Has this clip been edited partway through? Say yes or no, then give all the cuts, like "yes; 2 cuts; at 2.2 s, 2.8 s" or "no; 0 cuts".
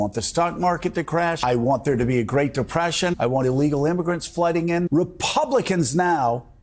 yes; 3 cuts; at 1.4 s, 3.1 s, 4.8 s